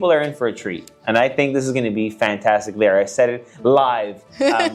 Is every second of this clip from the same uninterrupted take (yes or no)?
yes